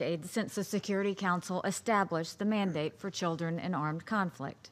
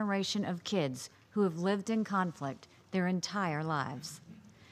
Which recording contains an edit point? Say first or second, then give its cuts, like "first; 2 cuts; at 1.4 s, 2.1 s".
second; 1 cut; at 2.0 s